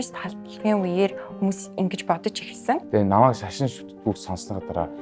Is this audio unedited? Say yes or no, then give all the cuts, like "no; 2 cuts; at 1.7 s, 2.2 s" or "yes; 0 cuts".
no; 1 cut; at 2.8 s